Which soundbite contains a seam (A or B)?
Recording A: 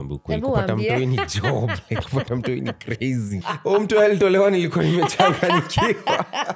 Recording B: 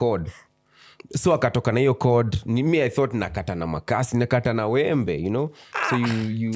A